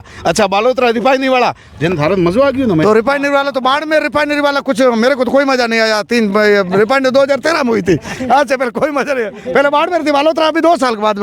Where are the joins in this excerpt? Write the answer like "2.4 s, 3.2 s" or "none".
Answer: none

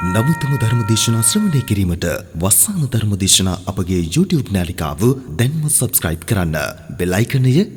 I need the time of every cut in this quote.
none

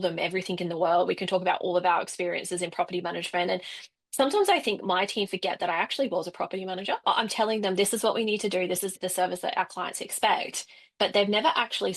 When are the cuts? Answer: 7.0 s, 9.0 s

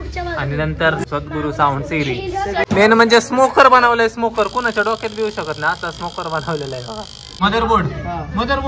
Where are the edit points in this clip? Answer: 1.0 s, 2.6 s, 7.4 s

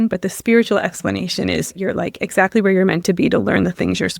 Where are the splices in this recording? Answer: 1.8 s

